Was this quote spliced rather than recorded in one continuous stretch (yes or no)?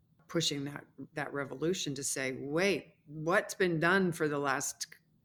no